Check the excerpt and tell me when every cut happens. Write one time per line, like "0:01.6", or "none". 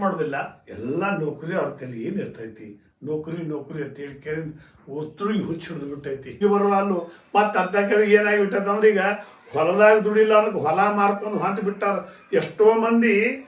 0:06.4